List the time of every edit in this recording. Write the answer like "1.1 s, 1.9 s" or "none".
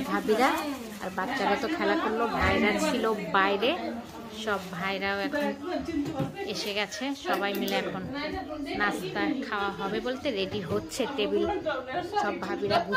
none